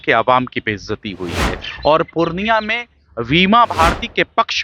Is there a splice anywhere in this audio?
yes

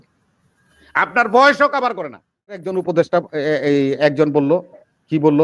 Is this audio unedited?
no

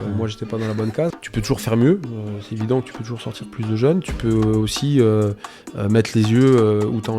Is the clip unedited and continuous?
no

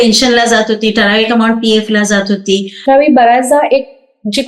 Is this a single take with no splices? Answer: no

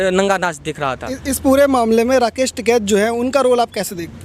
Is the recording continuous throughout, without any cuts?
yes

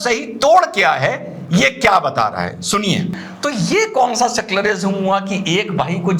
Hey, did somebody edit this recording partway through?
yes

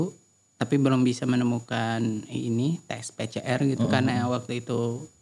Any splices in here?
no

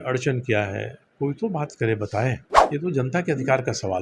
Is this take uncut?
no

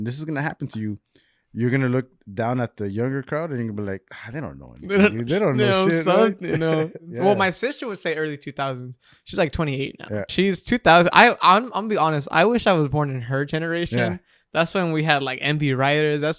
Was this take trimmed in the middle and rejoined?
yes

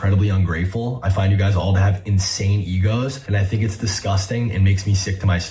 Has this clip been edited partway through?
yes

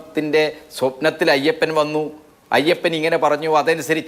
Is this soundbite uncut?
yes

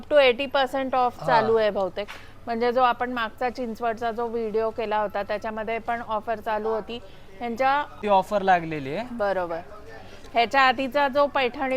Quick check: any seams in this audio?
yes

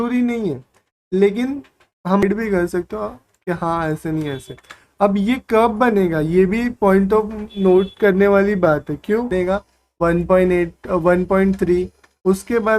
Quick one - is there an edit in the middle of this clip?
yes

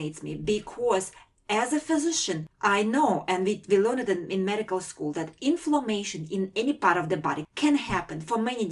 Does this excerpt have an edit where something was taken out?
yes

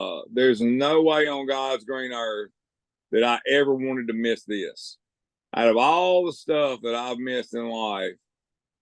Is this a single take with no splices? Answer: yes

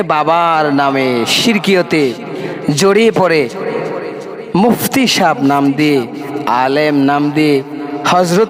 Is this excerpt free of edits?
yes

